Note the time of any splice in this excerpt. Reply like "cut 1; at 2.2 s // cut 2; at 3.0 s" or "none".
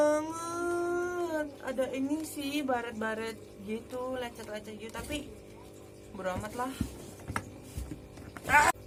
none